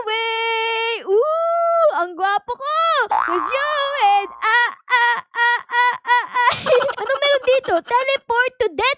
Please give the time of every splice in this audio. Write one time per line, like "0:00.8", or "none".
0:03.3